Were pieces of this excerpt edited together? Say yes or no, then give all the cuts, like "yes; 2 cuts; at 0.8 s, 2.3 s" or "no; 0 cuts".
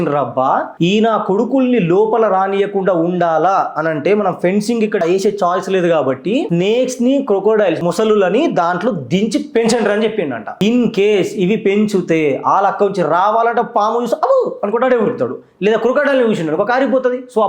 no; 0 cuts